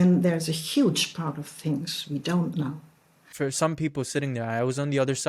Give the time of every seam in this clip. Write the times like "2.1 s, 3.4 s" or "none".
3.2 s